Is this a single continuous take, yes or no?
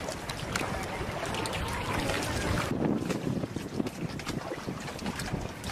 yes